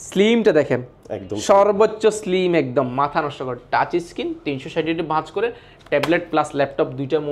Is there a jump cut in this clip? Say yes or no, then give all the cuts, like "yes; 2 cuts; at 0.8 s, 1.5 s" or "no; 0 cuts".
no; 0 cuts